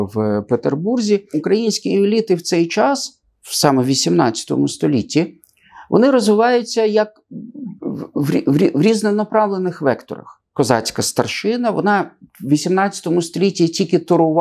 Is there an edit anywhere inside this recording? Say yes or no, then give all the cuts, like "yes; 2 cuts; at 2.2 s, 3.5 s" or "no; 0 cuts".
yes; 2 cuts; at 1.3 s, 10.4 s